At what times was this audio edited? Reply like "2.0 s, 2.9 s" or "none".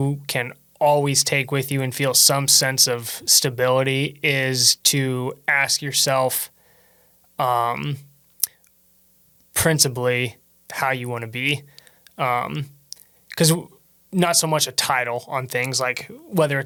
none